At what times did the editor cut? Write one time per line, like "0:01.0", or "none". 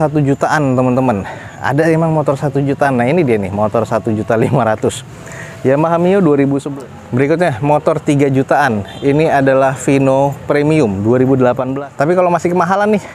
0:06.6
0:11.7